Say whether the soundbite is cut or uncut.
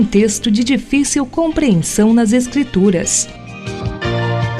cut